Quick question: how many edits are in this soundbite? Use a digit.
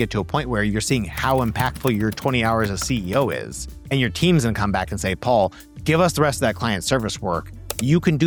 0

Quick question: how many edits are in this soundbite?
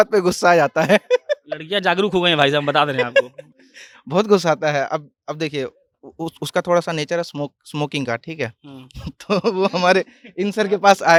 0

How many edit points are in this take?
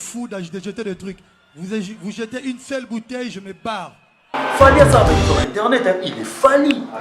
1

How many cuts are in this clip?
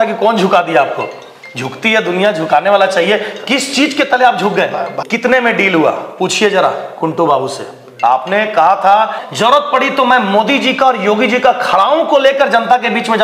3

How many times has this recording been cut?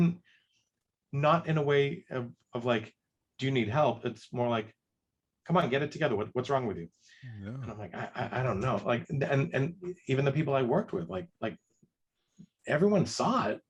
0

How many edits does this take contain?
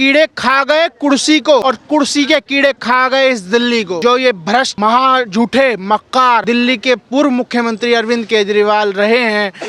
4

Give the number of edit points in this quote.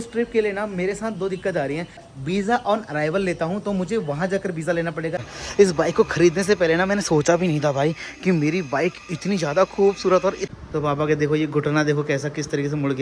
3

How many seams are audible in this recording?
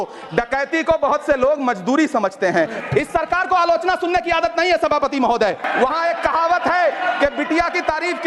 2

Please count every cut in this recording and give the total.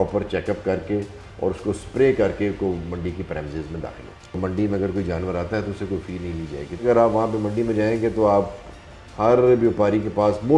2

